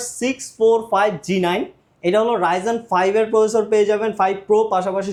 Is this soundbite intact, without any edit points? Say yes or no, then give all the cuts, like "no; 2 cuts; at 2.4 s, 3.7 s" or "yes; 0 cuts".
yes; 0 cuts